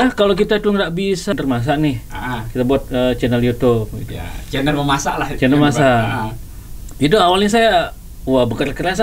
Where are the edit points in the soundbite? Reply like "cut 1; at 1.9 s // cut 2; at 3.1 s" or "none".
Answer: cut 1; at 1.3 s